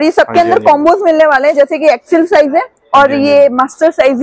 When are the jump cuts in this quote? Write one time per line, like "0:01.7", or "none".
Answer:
none